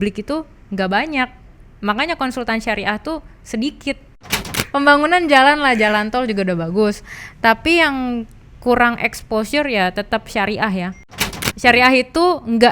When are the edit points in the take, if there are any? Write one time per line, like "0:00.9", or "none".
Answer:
0:04.3
0:11.3